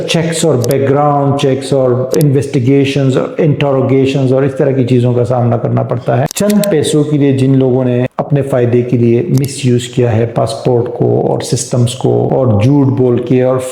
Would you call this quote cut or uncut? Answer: uncut